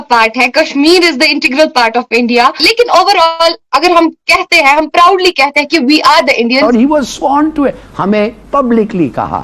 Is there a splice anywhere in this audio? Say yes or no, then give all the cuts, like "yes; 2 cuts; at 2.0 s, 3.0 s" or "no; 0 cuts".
yes; 2 cuts; at 2.6 s, 6.6 s